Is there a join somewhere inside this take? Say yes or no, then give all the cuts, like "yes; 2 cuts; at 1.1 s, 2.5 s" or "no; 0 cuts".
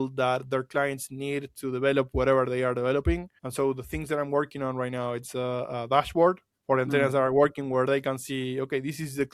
yes; 1 cut; at 3.3 s